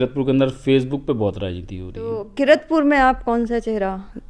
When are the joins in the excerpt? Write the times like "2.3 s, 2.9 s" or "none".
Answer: 2.2 s